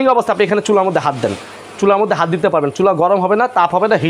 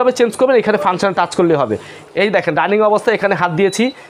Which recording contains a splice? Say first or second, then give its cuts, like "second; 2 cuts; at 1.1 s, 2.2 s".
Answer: second; 1 cut; at 2.2 s